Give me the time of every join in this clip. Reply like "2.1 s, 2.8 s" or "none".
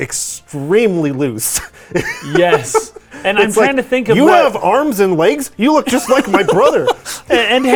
none